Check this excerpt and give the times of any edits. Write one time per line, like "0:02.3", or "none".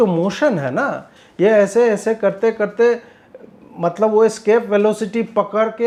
none